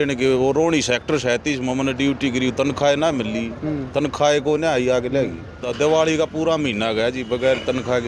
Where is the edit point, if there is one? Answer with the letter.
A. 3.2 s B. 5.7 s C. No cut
B